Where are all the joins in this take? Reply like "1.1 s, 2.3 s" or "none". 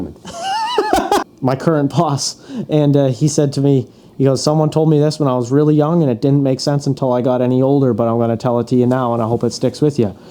1.3 s